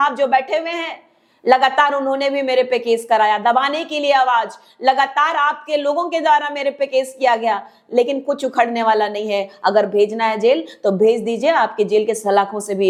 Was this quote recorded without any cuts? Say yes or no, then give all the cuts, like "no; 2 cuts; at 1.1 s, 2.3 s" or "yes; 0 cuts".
yes; 0 cuts